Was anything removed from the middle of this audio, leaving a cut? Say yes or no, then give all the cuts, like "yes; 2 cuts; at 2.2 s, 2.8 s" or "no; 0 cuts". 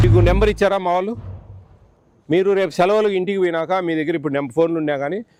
no; 0 cuts